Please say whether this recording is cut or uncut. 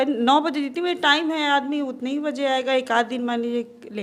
uncut